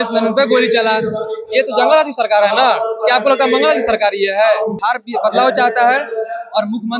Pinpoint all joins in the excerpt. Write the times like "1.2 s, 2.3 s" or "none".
4.8 s